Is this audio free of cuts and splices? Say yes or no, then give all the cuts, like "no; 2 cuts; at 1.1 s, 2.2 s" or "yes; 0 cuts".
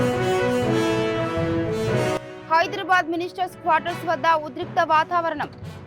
no; 1 cut; at 2.3 s